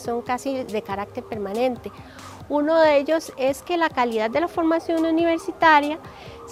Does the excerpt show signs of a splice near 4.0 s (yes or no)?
no